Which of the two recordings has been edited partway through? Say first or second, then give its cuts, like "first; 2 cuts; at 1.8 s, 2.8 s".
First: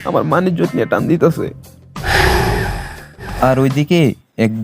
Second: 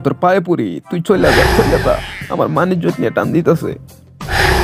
first; 1 cut; at 3.3 s